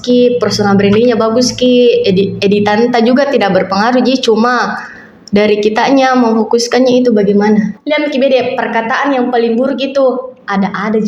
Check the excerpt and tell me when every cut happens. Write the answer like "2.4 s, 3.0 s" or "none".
7.8 s